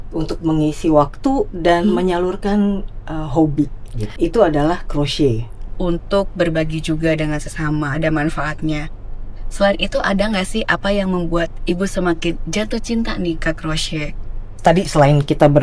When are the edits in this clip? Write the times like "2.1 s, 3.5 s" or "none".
5.7 s, 14.2 s